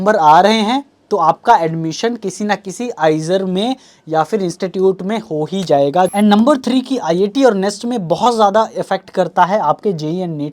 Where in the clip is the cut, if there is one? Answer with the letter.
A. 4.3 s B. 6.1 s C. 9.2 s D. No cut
B